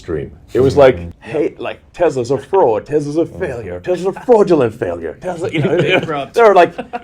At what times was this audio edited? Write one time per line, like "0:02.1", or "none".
0:01.1